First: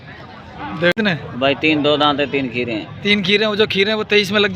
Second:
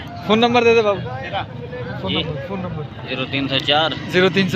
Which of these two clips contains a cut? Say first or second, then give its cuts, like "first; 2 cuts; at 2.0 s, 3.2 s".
first; 1 cut; at 0.9 s